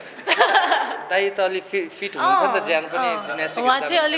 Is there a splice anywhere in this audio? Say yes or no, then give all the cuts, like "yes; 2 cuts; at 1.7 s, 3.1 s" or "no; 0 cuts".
no; 0 cuts